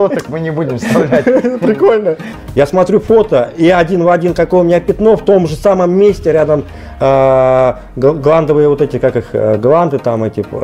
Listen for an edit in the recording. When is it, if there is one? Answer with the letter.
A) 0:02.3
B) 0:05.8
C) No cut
A